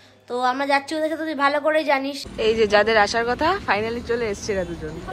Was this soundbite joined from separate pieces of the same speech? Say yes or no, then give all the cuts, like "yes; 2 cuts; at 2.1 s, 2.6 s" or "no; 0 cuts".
yes; 1 cut; at 2.2 s